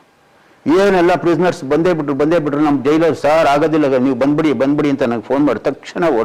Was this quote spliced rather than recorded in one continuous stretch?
no; 0 cuts

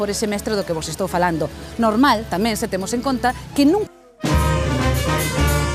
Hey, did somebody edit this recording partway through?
no; 0 cuts

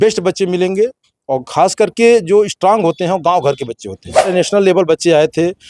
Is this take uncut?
no; 1 cut; at 4.3 s

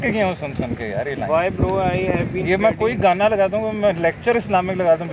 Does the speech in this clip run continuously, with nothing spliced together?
yes; 0 cuts

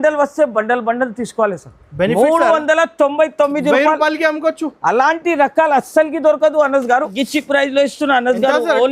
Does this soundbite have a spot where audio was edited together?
yes; 1 cut; at 7.2 s

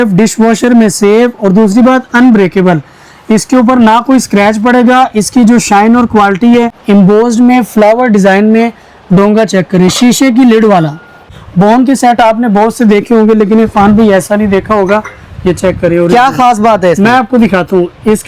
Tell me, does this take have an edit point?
yes; 2 cuts; at 6.8 s, 11.2 s

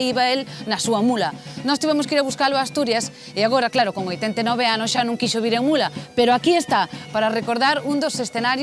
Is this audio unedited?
no; 1 cut; at 5.8 s

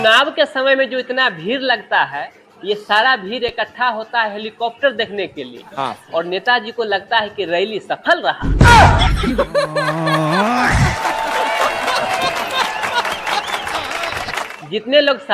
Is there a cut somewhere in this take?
no; 0 cuts

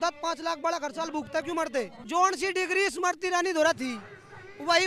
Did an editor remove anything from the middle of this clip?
yes; 1 cut; at 2.0 s

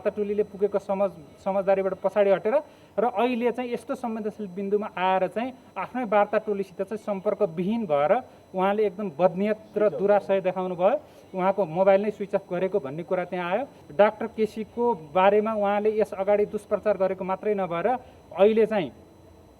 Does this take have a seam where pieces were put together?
yes; 1 cut; at 13.8 s

